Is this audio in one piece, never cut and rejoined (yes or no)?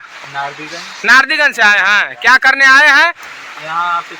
yes